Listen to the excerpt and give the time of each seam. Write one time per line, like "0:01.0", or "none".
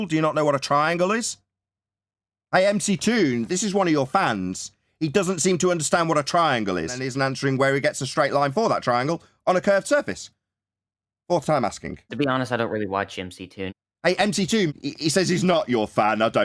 0:07.1
0:12.1
0:13.6
0:14.7